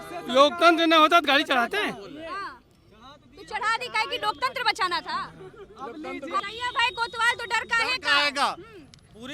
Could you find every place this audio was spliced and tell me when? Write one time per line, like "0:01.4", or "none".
0:06.4